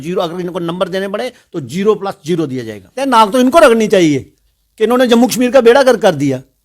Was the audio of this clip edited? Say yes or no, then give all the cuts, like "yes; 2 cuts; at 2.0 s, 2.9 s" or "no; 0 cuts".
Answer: yes; 1 cut; at 3.0 s